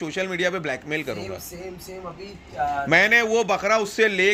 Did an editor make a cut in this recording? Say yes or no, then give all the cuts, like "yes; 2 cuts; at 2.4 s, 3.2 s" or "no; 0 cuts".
no; 0 cuts